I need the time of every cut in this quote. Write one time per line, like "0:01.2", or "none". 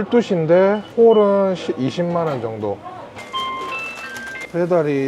none